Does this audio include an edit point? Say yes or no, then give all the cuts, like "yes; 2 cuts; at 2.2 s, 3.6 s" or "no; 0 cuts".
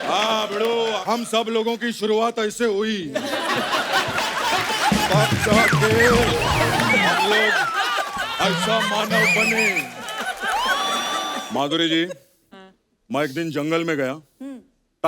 yes; 1 cut; at 11.3 s